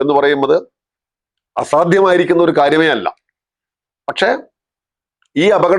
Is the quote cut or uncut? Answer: uncut